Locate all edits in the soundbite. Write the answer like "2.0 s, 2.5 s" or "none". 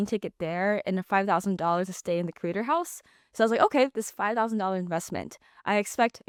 none